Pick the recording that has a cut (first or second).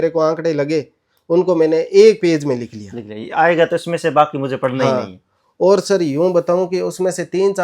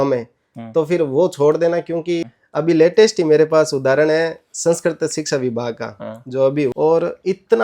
second